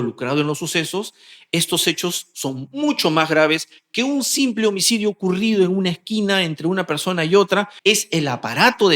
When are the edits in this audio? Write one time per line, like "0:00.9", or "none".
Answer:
0:07.7